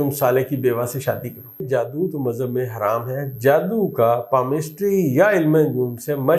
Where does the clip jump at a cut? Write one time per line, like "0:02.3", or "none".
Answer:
0:01.7